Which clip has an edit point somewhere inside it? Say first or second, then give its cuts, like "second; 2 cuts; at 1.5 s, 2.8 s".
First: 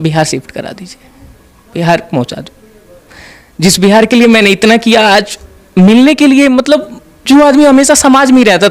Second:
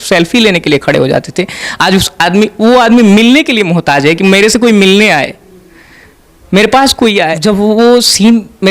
second; 1 cut; at 7.3 s